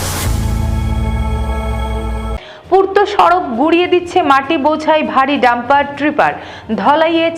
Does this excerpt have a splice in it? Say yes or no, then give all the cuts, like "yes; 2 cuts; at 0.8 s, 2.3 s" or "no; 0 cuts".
no; 0 cuts